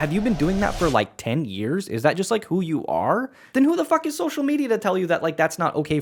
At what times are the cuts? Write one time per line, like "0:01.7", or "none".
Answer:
none